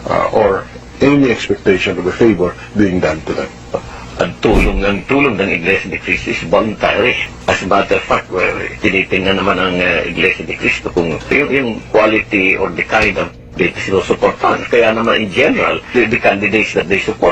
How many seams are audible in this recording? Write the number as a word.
three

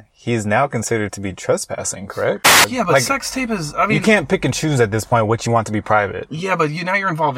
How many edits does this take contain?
one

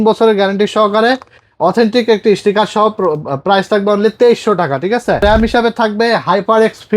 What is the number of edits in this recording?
one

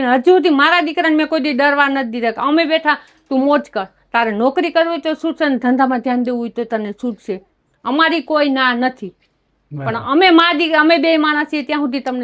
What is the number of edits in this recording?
zero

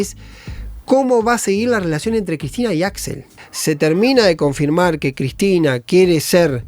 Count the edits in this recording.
one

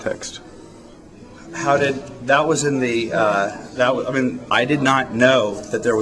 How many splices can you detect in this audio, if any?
one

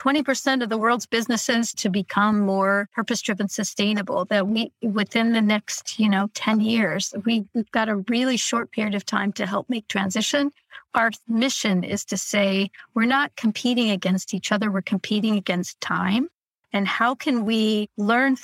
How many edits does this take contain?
zero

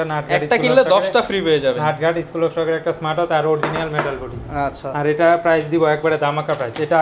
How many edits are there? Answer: zero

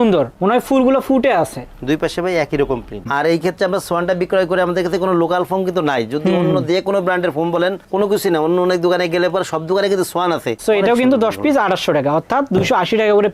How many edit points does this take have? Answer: two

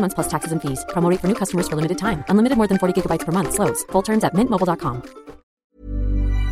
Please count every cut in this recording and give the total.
one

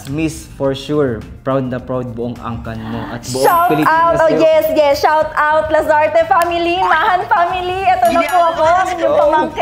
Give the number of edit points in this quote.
zero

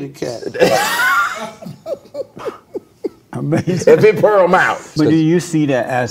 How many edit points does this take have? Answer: one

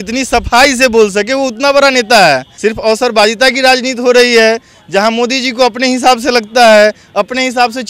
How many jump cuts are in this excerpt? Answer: one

